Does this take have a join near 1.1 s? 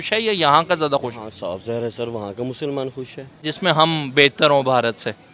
no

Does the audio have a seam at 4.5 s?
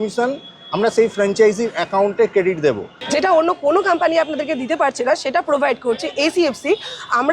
no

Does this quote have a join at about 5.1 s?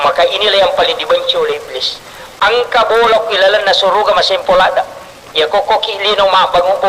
no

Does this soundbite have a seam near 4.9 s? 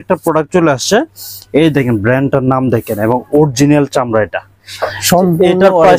yes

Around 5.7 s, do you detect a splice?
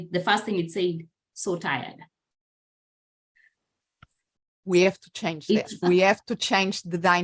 yes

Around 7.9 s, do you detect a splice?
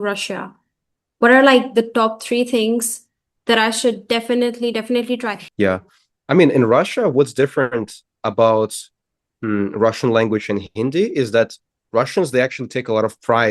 no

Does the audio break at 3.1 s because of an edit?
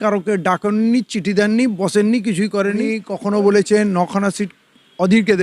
yes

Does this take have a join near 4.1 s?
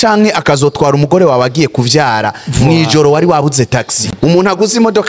yes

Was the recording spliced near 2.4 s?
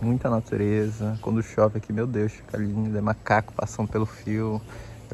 no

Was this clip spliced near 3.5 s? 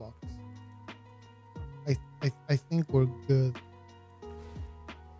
yes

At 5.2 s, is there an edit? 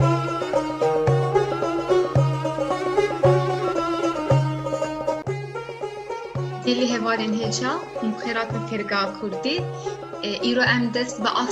yes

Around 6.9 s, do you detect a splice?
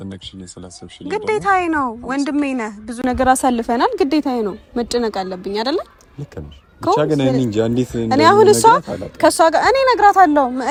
no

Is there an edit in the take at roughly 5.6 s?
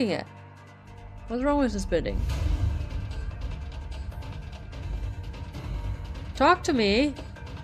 no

